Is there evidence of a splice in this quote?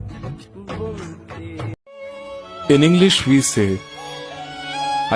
yes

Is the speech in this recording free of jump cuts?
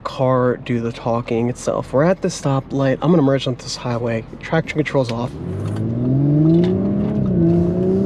yes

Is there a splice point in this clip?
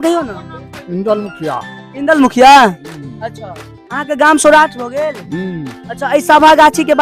no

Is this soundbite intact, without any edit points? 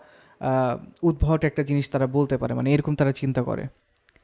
yes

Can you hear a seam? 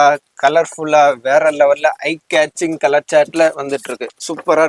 no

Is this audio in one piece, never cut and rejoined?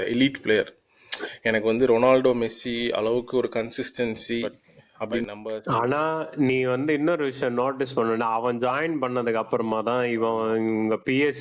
no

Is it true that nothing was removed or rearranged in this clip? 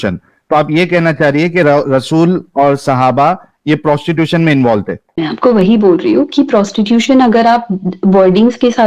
yes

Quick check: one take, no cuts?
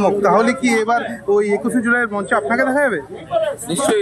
yes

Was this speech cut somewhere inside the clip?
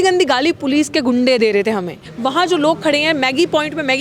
yes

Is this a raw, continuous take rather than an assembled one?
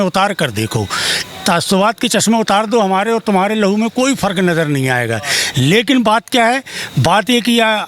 yes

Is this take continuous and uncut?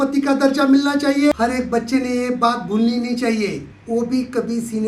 no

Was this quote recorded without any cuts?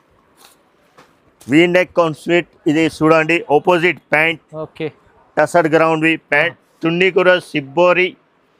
yes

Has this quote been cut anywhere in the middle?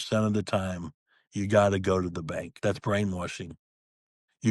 yes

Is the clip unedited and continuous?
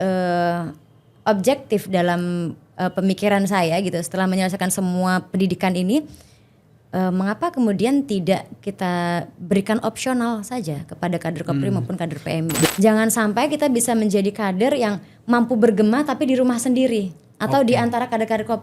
no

